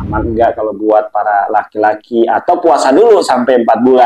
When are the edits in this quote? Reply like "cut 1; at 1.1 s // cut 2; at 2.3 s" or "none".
none